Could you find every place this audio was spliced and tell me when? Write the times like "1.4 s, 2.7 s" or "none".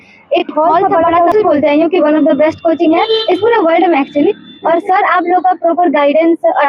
1.3 s